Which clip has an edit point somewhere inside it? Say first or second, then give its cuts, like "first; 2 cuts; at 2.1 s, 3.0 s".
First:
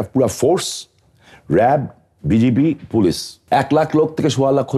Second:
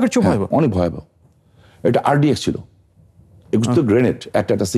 first; 1 cut; at 3.3 s